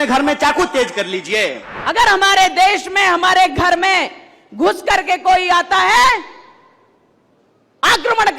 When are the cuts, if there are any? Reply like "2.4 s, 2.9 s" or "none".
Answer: 1.7 s